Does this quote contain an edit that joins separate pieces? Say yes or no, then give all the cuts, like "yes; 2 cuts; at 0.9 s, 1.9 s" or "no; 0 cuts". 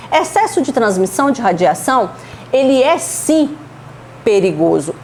no; 0 cuts